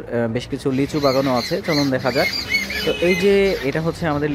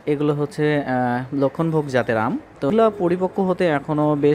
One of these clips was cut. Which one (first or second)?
second